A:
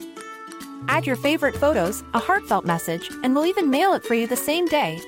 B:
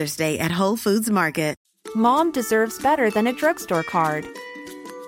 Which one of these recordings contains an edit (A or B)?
B